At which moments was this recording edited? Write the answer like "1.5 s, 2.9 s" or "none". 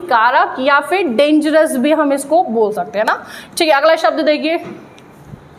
none